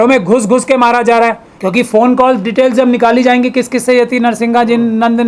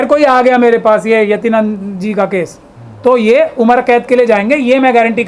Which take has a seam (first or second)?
first